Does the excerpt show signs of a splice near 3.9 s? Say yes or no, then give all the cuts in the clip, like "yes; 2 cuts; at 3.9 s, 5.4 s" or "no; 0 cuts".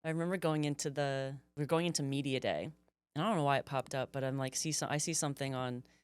no; 1 cut; at 1.5 s